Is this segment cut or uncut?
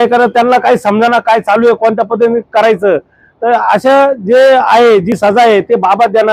uncut